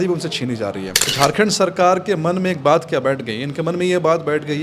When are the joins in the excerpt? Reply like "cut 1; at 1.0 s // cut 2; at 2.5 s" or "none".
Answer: cut 1; at 1.1 s